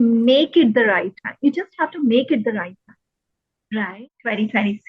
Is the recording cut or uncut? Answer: cut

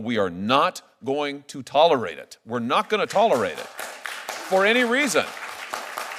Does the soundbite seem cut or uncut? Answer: uncut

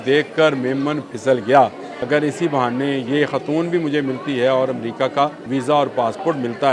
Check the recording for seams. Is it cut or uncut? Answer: cut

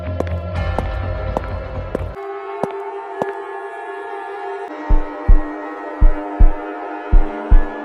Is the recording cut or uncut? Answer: cut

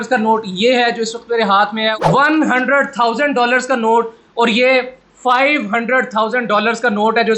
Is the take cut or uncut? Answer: uncut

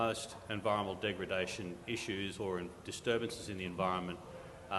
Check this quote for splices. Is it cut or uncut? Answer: uncut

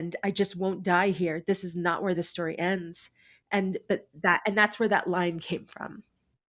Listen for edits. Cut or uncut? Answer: uncut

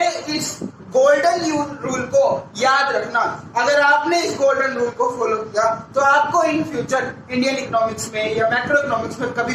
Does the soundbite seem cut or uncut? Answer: uncut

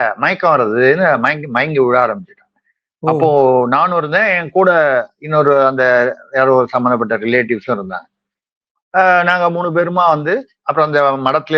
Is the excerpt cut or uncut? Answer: uncut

